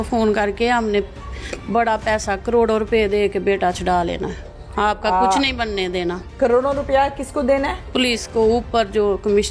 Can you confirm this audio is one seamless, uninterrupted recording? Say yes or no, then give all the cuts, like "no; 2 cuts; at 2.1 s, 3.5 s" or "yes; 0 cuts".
yes; 0 cuts